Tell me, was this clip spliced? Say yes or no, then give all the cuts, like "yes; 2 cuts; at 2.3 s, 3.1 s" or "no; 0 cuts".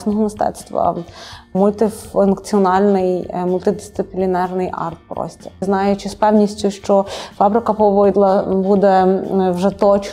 yes; 2 cuts; at 1.5 s, 5.6 s